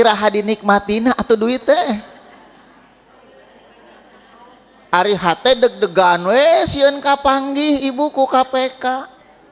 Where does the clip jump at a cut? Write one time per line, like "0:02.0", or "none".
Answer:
none

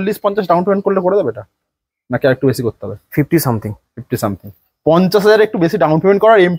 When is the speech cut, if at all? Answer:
none

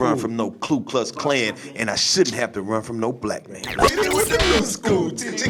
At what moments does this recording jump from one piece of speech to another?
0:03.8

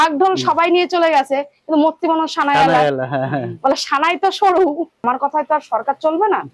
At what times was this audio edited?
0:05.0

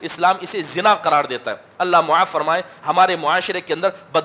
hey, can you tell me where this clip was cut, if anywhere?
none

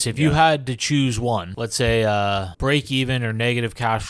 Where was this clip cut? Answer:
0:01.6
0:02.5

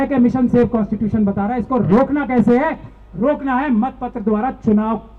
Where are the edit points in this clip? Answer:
none

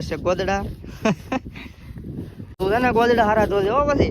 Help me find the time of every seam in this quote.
0:02.5

